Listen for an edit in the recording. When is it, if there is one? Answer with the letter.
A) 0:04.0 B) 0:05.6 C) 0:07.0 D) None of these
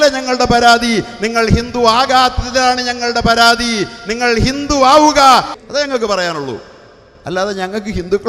B